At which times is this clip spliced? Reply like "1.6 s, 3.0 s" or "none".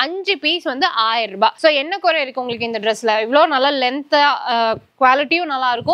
none